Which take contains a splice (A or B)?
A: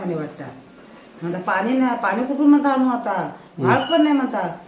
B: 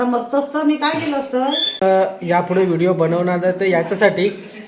B